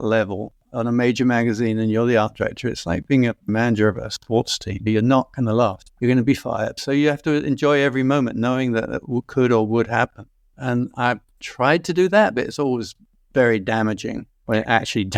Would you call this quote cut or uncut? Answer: uncut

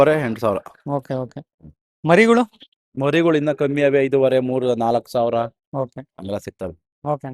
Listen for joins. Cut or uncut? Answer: uncut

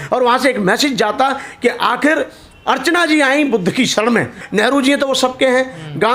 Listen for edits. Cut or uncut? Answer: cut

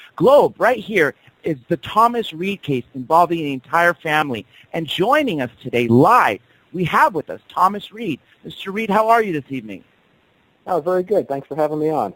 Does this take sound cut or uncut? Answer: cut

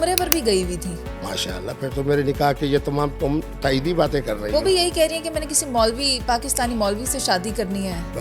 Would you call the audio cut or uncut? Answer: uncut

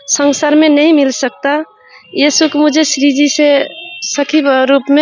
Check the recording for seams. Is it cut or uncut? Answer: uncut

